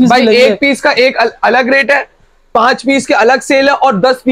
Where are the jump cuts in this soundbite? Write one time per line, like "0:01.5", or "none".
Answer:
none